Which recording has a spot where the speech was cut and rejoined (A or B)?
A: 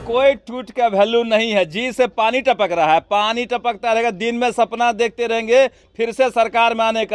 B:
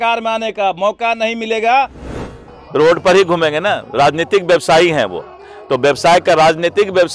B